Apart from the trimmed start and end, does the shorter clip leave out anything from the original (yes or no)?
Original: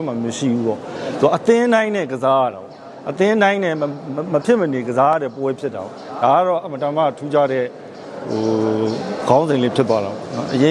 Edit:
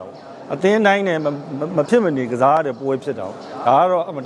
no